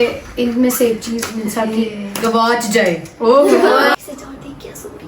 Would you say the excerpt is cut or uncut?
cut